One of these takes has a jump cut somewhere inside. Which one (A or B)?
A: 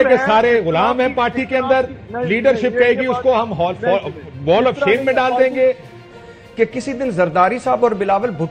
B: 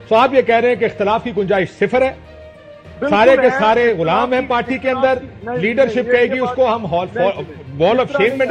A